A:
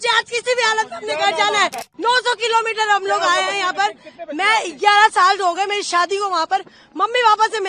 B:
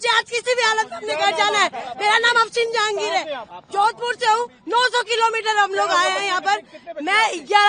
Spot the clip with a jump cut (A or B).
A